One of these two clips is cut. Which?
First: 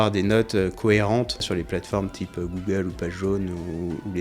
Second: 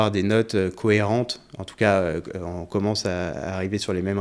first; 1 cut; at 1.5 s

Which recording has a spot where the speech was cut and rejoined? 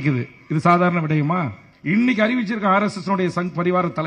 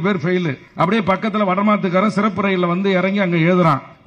first; 1 cut; at 1.7 s

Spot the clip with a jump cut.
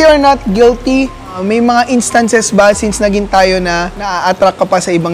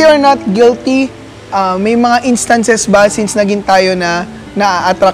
first; 2 cuts; at 1.4 s, 4.0 s

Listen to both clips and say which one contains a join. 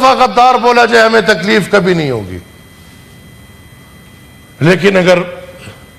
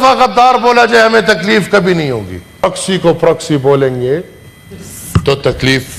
second; 1 cut; at 2.6 s

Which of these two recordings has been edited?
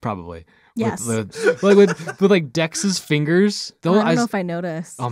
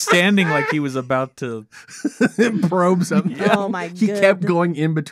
first; 2 cuts; at 1.3 s, 3.7 s

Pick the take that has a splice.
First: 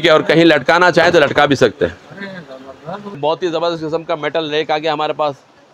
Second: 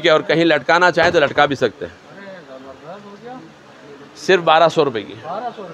first; 1 cut; at 3.2 s

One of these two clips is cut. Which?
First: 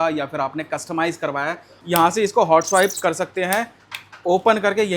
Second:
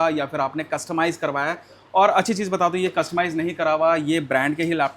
first; 1 cut; at 1.7 s

